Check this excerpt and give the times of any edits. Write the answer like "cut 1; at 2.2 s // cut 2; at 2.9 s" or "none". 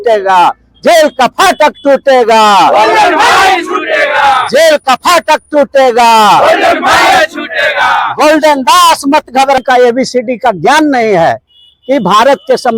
cut 1; at 9.6 s